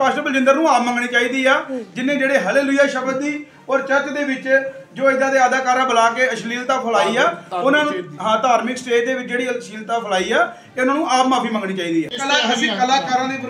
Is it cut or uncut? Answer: cut